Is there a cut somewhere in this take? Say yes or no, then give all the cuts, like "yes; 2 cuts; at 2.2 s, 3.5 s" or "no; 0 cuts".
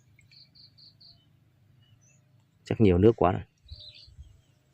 yes; 1 cut; at 3.7 s